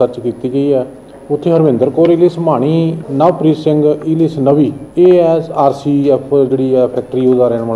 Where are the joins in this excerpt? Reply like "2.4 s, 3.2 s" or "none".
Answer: 3.0 s, 4.8 s